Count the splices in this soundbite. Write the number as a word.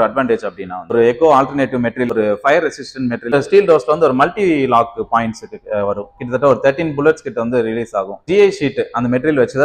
four